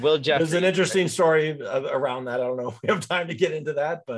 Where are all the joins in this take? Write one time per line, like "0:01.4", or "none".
none